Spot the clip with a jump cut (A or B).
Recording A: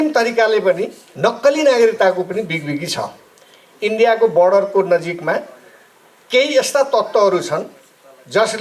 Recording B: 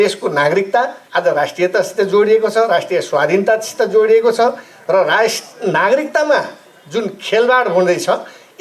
B